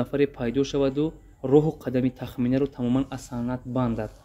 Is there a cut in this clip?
no; 0 cuts

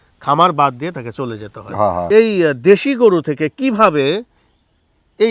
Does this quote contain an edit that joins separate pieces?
yes; 1 cut; at 2.1 s

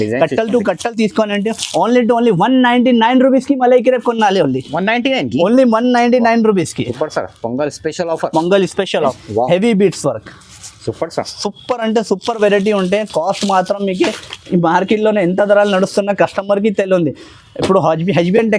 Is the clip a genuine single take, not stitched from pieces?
no; 1 cut; at 9.2 s

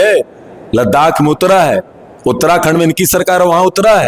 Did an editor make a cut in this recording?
no; 0 cuts

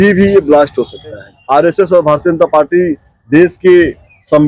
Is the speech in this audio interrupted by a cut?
yes; 1 cut; at 1.3 s

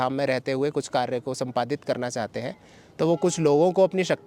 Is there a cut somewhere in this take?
no; 0 cuts

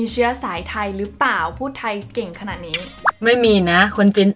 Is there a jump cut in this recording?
no; 0 cuts

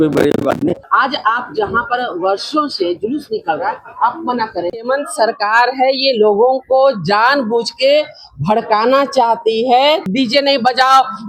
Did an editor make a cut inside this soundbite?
yes; 3 cuts; at 0.9 s, 4.7 s, 10.1 s

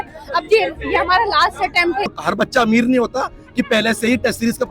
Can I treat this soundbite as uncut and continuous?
no; 1 cut; at 2.2 s

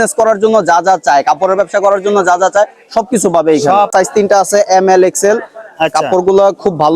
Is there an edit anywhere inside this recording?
yes; 1 cut; at 3.9 s

